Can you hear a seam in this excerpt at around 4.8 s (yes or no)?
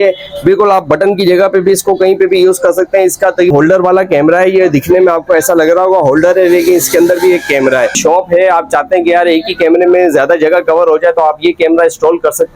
no